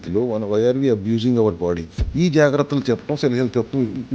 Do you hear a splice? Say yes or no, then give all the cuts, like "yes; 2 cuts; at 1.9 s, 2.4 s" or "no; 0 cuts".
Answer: yes; 1 cut; at 2.0 s